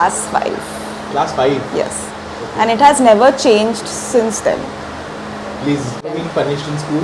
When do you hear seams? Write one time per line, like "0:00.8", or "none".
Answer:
0:06.1